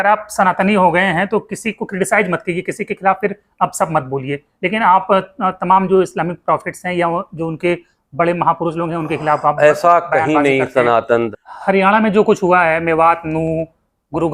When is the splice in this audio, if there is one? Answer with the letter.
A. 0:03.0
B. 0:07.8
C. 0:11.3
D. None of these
C